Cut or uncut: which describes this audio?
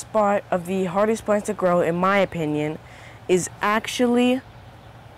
uncut